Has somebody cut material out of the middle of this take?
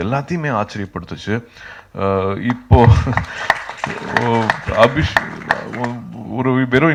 no; 0 cuts

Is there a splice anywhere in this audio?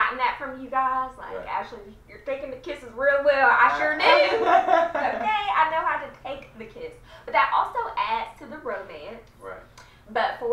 no; 0 cuts

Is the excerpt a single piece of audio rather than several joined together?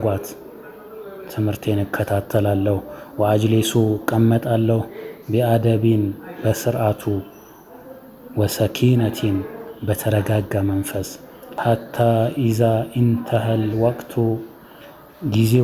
no; 1 cut; at 11.5 s

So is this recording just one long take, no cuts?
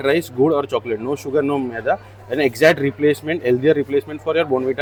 yes; 0 cuts

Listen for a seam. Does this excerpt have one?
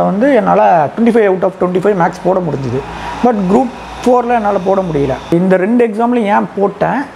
yes; 1 cut; at 5.3 s

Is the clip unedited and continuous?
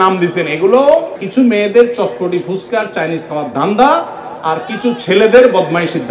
no; 1 cut; at 1.2 s

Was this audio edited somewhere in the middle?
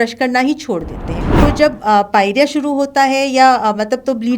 yes; 1 cut; at 1.2 s

